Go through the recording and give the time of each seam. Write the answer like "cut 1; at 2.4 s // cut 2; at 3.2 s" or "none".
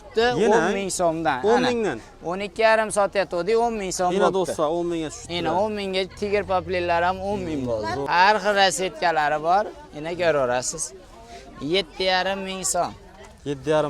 cut 1; at 8.0 s